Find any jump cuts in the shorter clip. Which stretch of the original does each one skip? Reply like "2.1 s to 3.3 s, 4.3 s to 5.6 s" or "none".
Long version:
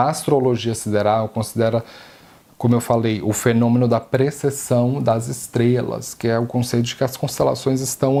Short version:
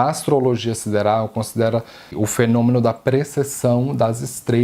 2.1 s to 3.2 s